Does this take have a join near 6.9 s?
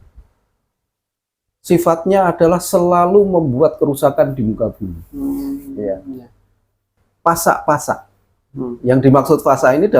yes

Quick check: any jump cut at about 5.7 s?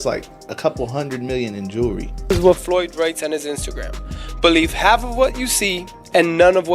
no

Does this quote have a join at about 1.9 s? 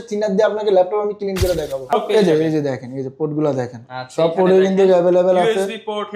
yes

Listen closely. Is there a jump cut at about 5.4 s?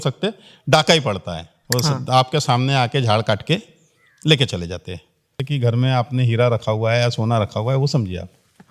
yes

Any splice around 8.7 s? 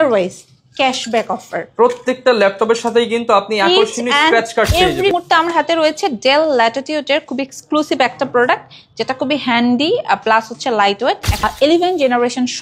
no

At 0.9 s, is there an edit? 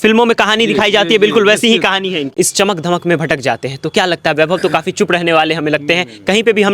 no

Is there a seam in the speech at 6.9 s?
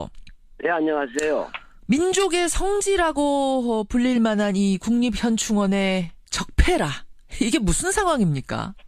no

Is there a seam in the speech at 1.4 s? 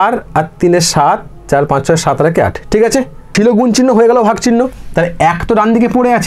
no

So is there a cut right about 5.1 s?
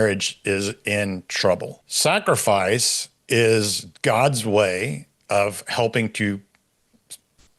no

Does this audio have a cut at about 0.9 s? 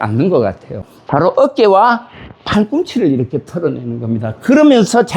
yes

